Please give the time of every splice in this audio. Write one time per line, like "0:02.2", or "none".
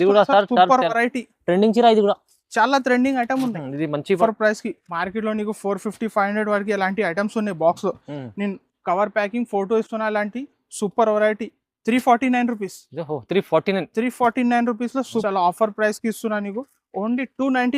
0:04.2
0:15.2